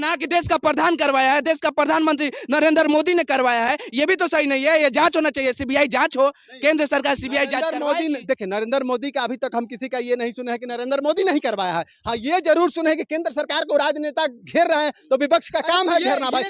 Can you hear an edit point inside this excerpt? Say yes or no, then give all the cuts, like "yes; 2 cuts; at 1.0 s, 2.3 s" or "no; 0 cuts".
no; 0 cuts